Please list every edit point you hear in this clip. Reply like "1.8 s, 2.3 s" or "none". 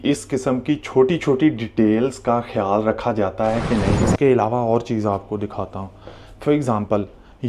3.9 s